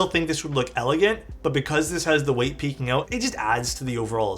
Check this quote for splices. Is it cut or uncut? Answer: cut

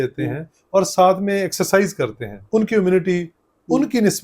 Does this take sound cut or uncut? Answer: cut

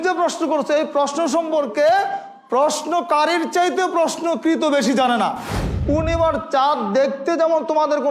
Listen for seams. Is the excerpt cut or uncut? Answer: cut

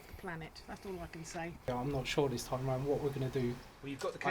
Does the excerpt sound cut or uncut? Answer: cut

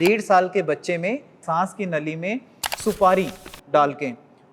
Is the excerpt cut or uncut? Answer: cut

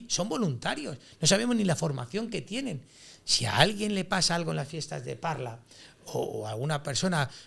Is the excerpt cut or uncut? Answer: uncut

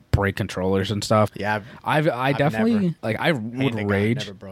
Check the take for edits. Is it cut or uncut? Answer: cut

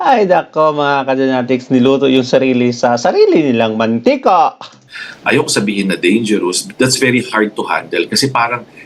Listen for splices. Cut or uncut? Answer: uncut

